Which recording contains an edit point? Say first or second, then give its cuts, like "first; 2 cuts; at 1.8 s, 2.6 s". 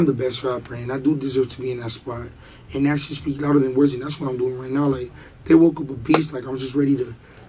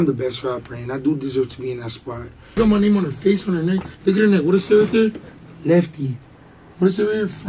second; 1 cut; at 2.6 s